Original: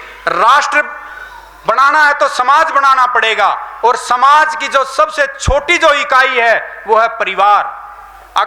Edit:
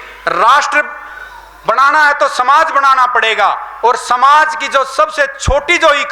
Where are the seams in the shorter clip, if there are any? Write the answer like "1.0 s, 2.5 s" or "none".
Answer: none